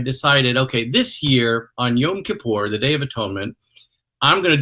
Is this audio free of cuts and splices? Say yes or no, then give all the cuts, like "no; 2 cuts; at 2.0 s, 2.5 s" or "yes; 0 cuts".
yes; 0 cuts